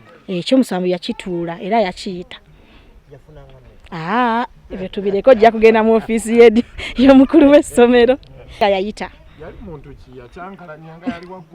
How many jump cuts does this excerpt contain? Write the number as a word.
one